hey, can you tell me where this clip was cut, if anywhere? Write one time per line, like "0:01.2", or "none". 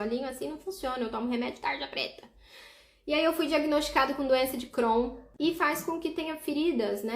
0:05.2

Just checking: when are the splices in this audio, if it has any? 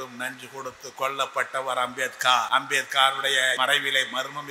0:02.5
0:03.6

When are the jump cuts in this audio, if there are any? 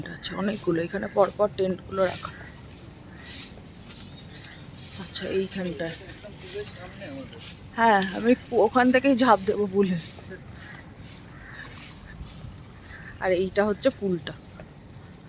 none

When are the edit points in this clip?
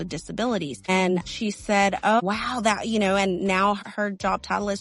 0:01.2
0:02.2
0:03.8

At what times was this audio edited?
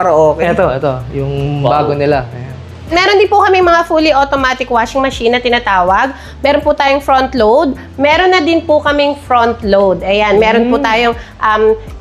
0:03.1

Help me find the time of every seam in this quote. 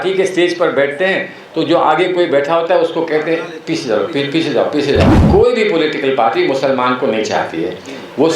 0:05.2

